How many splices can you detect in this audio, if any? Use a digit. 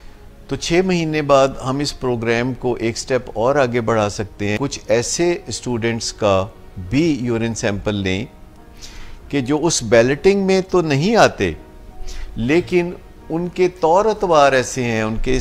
1